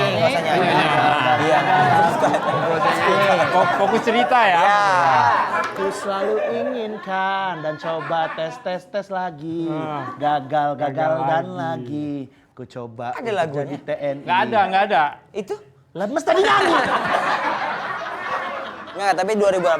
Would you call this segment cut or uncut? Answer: uncut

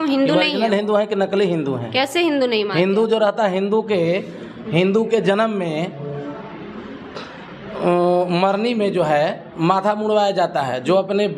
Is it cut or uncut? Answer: uncut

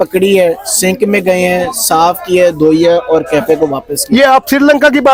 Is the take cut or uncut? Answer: uncut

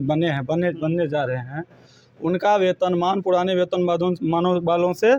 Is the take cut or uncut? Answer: uncut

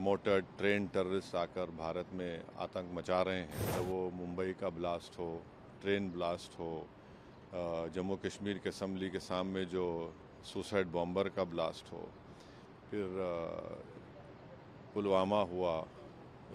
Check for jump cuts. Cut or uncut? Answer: cut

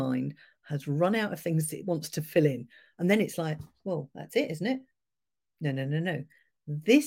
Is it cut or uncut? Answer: uncut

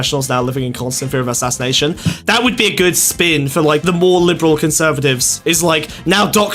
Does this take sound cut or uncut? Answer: cut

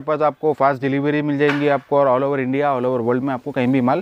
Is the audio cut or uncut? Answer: uncut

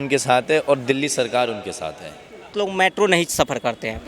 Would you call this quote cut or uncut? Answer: cut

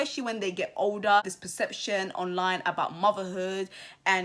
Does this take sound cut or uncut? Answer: cut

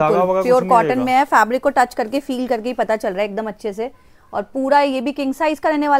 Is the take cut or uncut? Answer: uncut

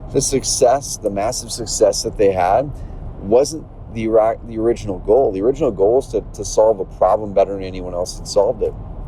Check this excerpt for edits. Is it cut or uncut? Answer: uncut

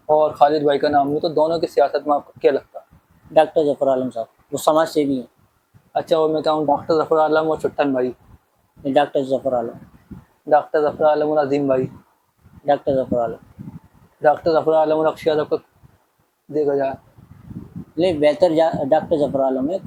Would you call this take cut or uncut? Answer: uncut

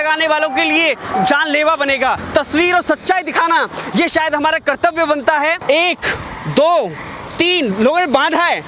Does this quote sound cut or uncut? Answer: cut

